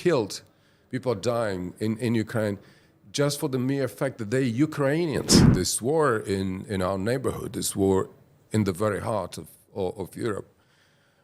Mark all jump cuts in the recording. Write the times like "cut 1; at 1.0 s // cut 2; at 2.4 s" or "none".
cut 1; at 5.4 s